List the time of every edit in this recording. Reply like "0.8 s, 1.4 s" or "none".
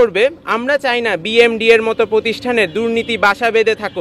none

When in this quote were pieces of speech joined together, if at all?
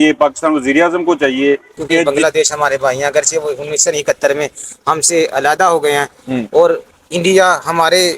2.0 s

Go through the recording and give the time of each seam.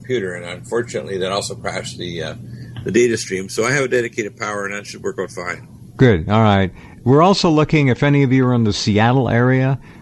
3.3 s

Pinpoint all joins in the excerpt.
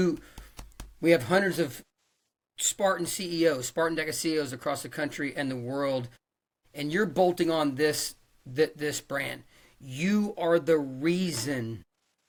none

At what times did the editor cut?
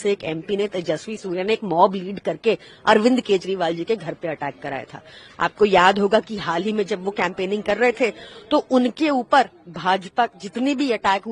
none

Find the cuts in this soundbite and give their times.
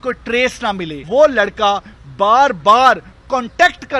1.0 s

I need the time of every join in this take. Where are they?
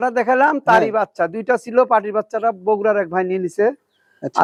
none

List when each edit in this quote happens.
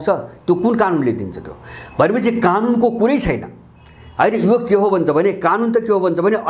none

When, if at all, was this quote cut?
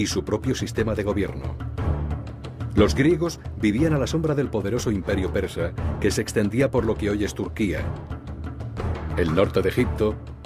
none

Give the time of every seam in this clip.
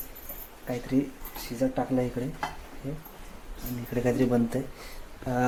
none

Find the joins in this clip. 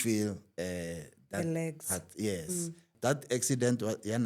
2.9 s

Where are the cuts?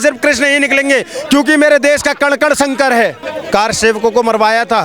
3.3 s

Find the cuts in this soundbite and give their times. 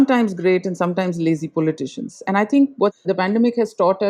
3.0 s

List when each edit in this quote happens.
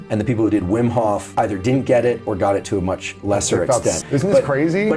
4.0 s

